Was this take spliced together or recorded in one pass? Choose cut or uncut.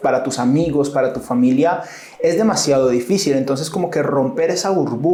uncut